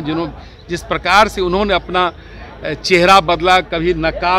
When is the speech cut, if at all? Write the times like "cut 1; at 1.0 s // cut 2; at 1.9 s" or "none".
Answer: none